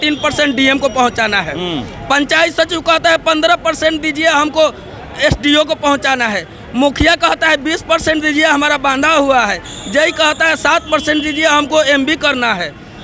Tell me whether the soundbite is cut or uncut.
uncut